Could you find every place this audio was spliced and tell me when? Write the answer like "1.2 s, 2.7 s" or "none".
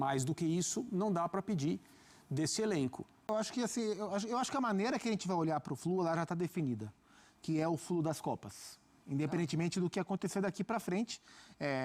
3.3 s